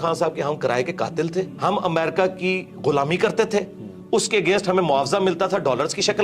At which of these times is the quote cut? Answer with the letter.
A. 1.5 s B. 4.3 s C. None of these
A